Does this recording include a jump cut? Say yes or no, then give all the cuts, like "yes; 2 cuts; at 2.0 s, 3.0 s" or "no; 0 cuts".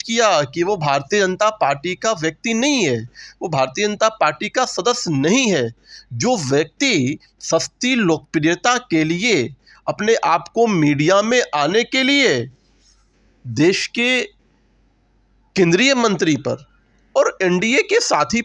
no; 0 cuts